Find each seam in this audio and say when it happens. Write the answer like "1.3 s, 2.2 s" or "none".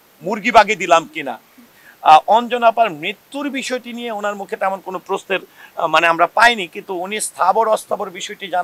1.8 s